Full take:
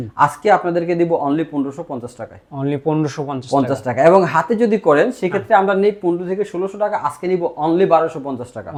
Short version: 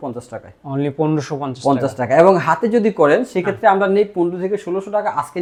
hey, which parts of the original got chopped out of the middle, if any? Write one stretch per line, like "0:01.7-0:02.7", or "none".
none